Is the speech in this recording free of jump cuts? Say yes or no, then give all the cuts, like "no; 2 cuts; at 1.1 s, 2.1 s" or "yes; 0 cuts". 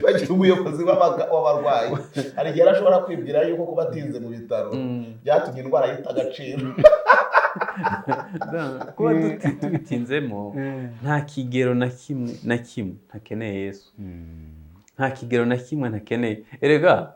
yes; 0 cuts